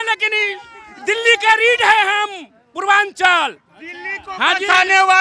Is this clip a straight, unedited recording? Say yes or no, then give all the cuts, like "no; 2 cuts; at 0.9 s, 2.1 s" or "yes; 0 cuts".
yes; 0 cuts